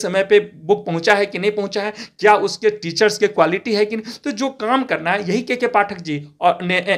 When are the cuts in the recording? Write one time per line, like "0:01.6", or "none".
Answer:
none